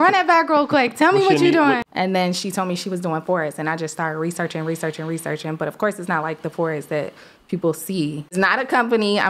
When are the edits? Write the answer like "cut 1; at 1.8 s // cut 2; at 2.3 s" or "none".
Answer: cut 1; at 1.8 s // cut 2; at 8.3 s

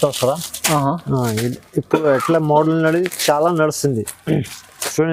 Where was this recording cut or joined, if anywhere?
none

